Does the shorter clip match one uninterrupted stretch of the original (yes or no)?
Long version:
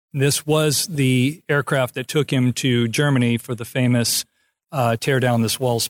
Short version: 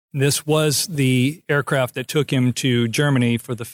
yes